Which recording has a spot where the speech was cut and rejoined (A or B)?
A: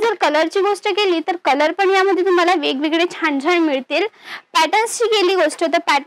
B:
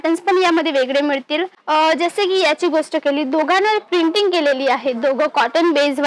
B